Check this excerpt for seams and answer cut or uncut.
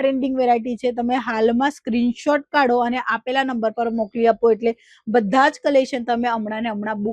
uncut